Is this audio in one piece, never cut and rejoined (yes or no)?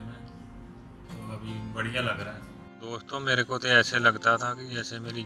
no